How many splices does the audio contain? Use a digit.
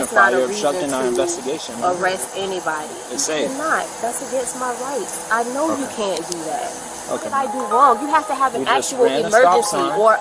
2